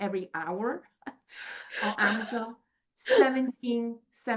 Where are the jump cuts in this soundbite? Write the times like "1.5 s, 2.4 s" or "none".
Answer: none